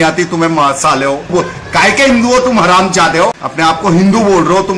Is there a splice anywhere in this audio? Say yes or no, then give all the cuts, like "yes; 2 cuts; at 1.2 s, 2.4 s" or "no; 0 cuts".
yes; 2 cuts; at 1.3 s, 3.4 s